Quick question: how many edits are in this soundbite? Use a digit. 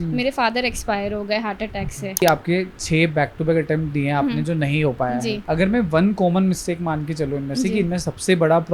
2